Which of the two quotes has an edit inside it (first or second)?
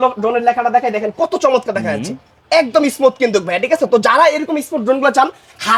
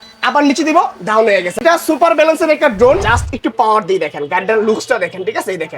second